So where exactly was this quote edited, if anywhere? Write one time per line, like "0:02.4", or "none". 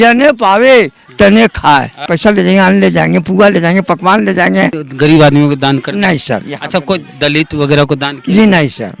0:02.1
0:04.8